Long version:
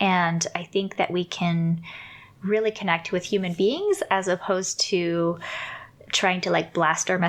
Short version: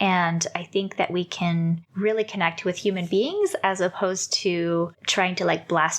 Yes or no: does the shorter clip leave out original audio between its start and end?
yes